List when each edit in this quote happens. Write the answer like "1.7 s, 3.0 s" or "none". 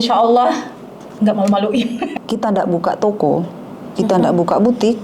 2.1 s